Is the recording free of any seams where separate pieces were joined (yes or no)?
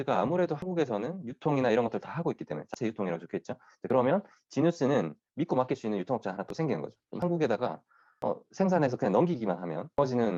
yes